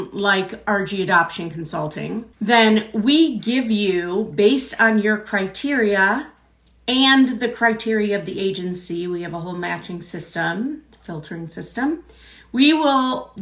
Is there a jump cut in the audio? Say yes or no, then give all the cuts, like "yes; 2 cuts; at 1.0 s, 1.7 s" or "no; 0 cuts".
yes; 1 cut; at 2.3 s